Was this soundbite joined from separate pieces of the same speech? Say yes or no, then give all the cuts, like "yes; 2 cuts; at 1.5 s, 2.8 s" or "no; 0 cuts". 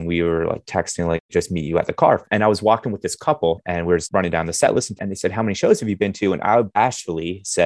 yes; 4 cuts; at 1.3 s, 2.2 s, 4.0 s, 5.0 s